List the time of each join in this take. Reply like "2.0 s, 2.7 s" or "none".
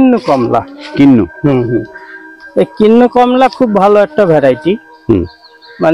none